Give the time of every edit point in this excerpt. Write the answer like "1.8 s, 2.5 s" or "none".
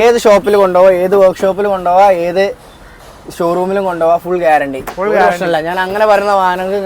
none